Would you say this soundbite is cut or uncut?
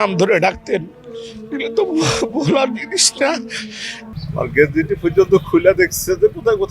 cut